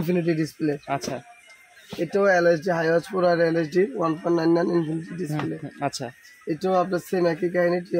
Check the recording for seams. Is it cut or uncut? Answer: uncut